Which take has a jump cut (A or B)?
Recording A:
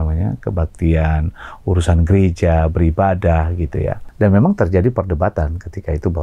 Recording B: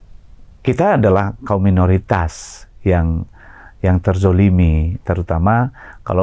A